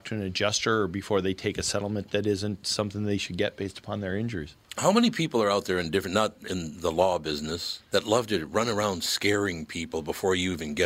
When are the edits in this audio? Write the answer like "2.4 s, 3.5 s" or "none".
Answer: none